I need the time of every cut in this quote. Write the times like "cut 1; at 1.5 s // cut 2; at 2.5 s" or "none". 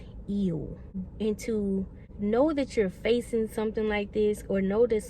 cut 1; at 1.0 s